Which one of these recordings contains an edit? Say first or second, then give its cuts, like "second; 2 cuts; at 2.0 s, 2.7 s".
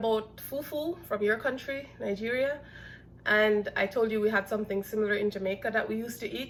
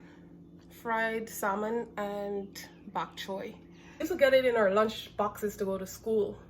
second; 1 cut; at 4.0 s